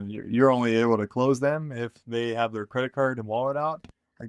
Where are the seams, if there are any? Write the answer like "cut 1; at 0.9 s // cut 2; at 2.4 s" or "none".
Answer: none